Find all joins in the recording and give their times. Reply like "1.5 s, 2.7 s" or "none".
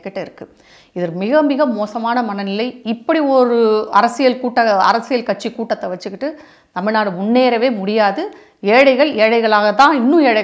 none